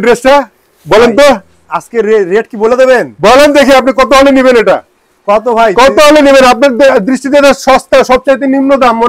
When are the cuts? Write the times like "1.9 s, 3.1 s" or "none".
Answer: none